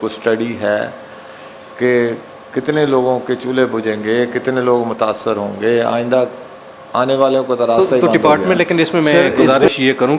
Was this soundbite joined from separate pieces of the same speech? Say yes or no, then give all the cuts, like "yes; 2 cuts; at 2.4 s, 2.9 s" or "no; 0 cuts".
yes; 1 cut; at 7.9 s